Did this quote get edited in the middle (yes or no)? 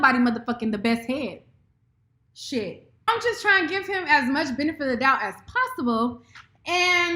yes